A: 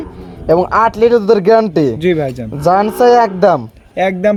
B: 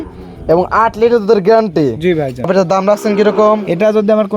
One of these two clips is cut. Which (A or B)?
B